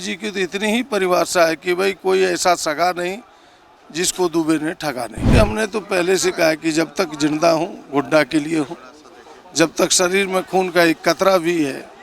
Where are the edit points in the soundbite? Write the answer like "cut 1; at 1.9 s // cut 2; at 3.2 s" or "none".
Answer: cut 1; at 5.3 s